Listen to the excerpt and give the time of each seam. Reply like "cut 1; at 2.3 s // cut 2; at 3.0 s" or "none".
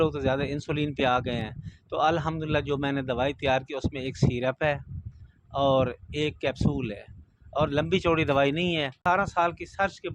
cut 1; at 9.0 s